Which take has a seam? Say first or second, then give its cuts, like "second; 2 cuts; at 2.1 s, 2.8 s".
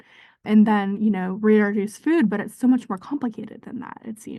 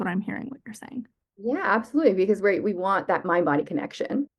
second; 1 cut; at 1.2 s